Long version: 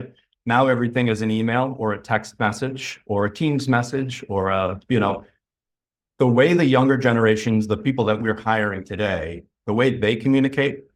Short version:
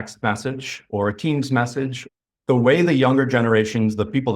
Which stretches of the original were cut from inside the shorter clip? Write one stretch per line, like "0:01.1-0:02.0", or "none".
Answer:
0:04.2-0:05.7